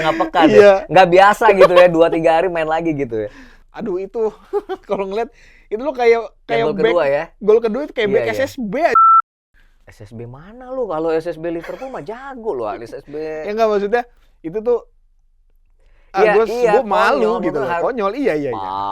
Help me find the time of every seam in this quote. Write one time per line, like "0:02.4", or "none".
0:03.6